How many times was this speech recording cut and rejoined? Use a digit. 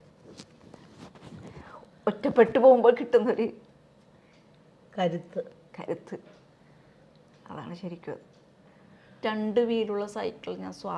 1